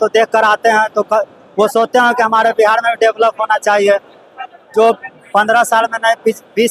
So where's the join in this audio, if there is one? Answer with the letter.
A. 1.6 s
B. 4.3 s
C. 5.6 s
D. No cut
D